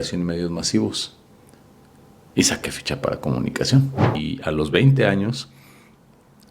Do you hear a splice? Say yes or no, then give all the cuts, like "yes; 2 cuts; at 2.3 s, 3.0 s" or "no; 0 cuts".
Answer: yes; 1 cut; at 4.2 s